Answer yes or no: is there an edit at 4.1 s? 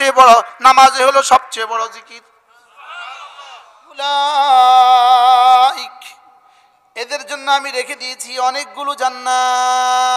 yes